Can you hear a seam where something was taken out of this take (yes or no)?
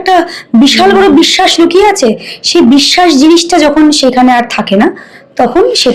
no